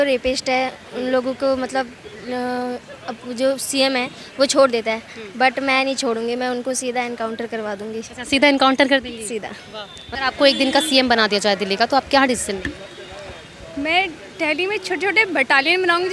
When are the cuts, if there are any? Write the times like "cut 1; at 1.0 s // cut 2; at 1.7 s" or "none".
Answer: none